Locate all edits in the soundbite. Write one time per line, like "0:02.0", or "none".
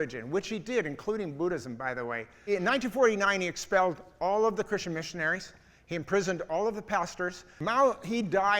0:02.5
0:07.5

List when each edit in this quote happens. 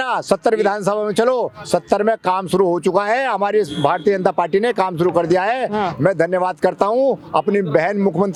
none

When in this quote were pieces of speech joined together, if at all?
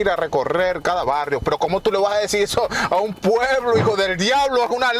none

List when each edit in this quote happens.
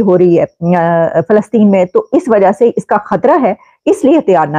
none

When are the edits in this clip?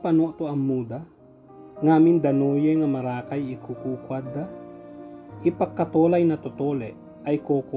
none

